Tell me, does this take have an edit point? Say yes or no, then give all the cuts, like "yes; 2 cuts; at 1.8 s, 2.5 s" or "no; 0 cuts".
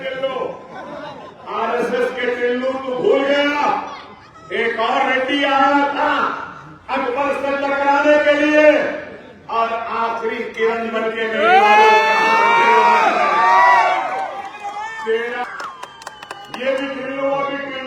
yes; 1 cut; at 15.5 s